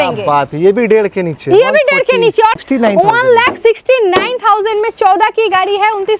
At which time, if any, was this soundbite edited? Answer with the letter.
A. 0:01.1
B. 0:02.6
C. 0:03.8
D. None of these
B